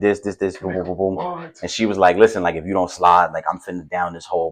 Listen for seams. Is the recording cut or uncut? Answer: uncut